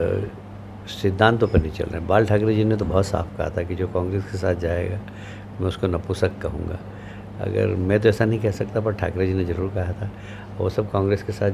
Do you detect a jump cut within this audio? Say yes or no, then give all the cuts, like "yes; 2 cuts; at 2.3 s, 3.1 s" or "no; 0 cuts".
no; 0 cuts